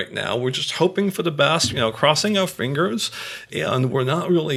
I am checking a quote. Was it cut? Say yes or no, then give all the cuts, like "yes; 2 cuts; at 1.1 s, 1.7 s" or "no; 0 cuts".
no; 0 cuts